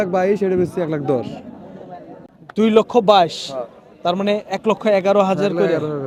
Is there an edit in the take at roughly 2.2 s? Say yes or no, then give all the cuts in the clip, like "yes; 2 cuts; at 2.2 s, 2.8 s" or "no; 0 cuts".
no; 0 cuts